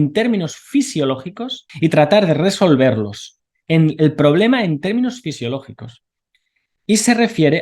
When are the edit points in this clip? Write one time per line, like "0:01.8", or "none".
0:01.6

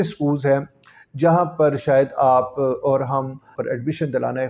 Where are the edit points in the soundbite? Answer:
0:03.5

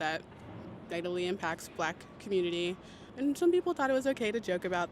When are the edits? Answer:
0:03.0

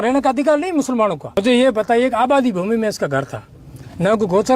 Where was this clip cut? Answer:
0:01.3

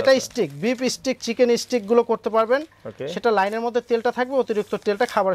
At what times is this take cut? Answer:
none

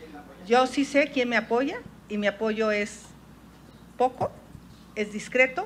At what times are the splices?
none

